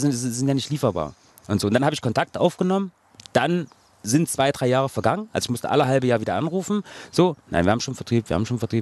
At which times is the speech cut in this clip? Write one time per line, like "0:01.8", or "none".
none